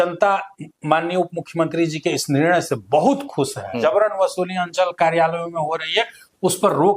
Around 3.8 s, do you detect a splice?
yes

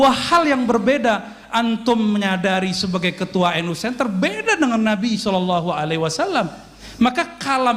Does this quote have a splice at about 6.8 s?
yes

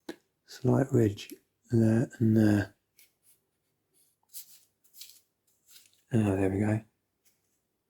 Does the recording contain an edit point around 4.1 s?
yes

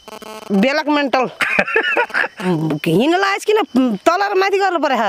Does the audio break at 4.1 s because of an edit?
no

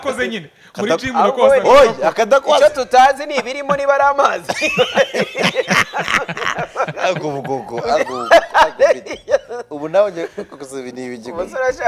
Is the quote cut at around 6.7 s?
no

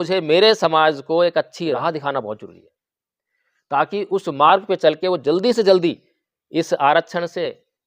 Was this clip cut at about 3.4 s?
no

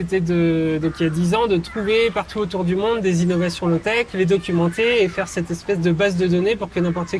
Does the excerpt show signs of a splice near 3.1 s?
no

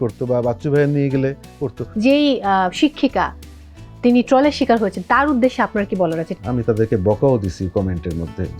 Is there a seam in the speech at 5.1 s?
no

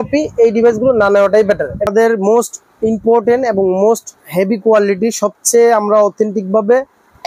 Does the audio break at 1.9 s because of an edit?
yes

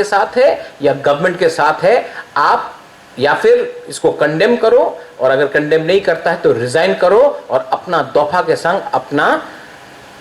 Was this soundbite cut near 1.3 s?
yes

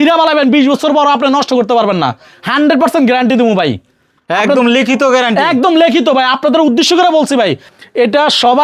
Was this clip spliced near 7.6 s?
yes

